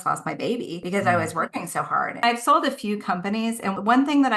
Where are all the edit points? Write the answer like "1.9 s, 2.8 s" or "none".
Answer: 2.2 s